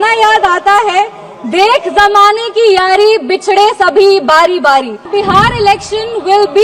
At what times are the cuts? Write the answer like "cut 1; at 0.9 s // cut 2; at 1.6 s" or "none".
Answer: cut 1; at 5.1 s

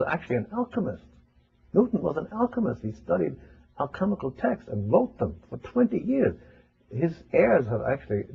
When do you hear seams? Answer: none

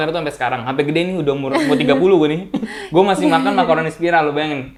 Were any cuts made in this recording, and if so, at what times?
none

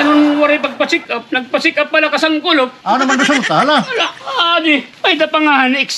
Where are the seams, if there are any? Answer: cut 1; at 2.8 s // cut 2; at 4.9 s

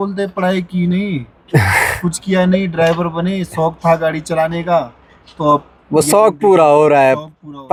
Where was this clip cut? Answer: none

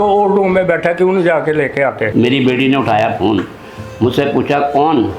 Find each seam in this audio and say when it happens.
cut 1; at 2.0 s

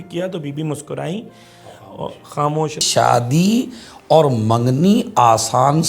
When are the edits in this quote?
cut 1; at 2.8 s

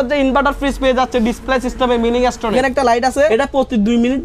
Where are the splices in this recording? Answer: cut 1; at 2.5 s // cut 2; at 3.3 s

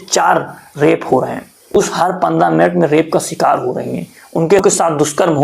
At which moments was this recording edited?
cut 1; at 1.8 s // cut 2; at 4.6 s

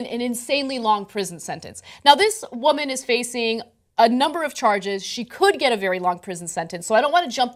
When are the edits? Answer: none

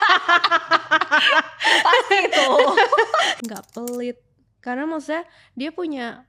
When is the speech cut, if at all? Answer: cut 1; at 3.3 s

